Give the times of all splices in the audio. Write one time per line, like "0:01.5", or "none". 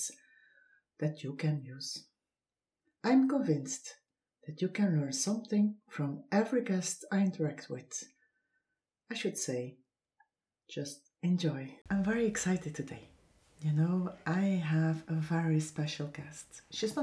0:11.7